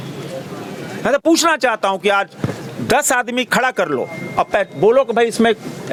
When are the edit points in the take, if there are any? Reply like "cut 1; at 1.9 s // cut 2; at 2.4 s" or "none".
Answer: none